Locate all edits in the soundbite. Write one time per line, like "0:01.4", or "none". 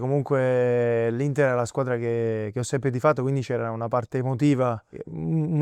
none